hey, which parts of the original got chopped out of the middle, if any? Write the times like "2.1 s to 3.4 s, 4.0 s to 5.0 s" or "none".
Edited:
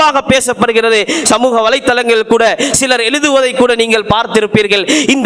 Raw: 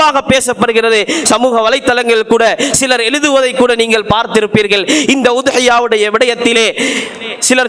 none